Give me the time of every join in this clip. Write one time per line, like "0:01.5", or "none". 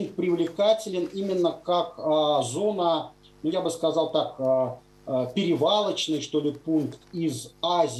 none

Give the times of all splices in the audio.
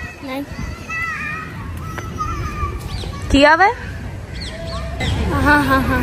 0:05.0

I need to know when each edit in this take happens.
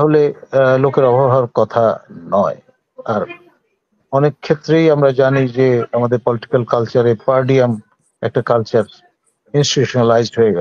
none

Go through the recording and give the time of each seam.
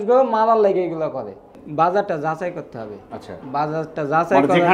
0:01.6

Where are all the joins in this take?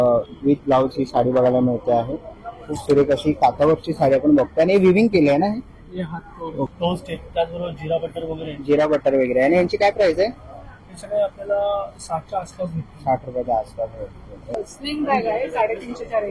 0:06.7
0:14.7

